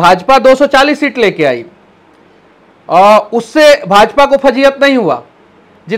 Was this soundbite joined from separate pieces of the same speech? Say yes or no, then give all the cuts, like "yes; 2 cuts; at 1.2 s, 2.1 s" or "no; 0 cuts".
no; 0 cuts